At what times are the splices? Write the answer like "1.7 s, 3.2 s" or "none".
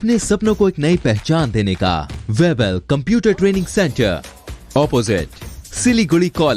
2.1 s